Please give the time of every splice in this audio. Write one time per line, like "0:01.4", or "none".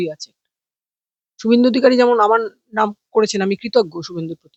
none